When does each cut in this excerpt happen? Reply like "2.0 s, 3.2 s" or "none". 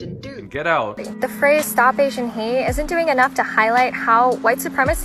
1.0 s